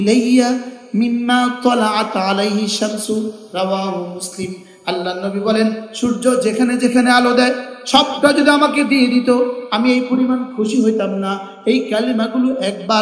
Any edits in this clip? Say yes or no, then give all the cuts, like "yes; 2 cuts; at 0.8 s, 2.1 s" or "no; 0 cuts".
no; 0 cuts